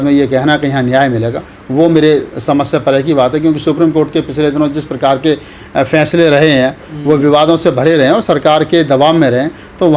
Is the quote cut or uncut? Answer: uncut